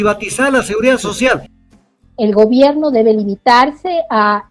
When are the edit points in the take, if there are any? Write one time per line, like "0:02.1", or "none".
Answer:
0:01.6